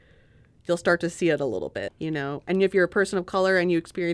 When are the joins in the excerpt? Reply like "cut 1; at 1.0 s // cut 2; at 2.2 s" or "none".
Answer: cut 1; at 1.8 s